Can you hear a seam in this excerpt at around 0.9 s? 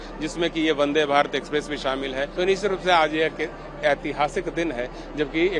no; 1 cut; at 2.3 s

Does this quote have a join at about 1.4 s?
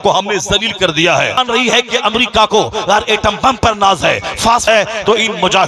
yes; 2 cuts; at 1.4 s, 4.6 s

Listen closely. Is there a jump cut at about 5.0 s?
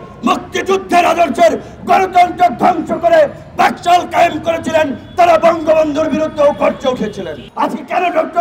no; 1 cut; at 7.4 s

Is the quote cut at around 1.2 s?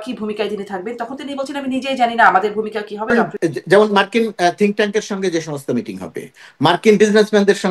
no; 1 cut; at 3.1 s

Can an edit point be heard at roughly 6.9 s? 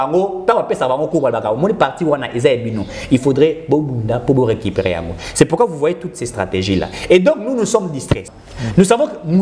no; 1 cut; at 8.2 s

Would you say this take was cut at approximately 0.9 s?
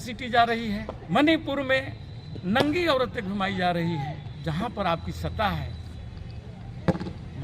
yes; 2 cuts; at 0.9 s, 4.3 s

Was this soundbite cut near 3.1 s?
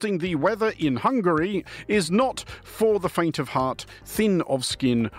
no; 1 cut; at 1.8 s

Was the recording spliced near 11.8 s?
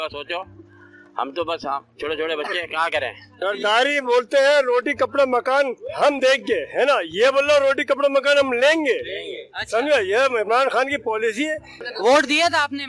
yes; 2 cuts; at 3.3 s, 11.8 s

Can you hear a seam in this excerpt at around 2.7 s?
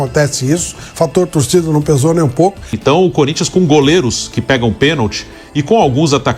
yes; 1 cut; at 2.7 s

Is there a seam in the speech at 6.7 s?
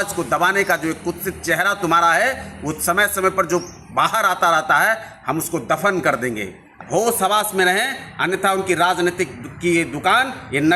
yes; 1 cut; at 6.7 s

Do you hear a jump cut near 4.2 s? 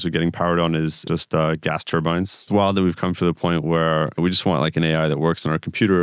yes; 3 cuts; at 1.0 s, 2.5 s, 4.2 s

